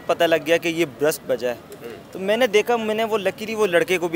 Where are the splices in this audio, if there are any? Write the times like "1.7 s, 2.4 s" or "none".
none